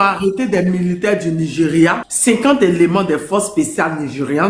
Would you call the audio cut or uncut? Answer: cut